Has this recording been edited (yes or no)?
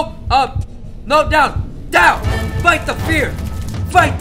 no